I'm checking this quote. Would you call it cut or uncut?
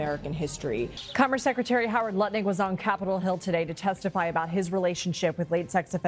cut